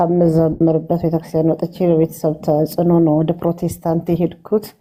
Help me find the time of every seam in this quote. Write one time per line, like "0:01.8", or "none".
none